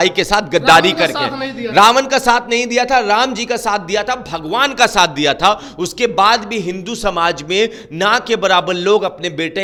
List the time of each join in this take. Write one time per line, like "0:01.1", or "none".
none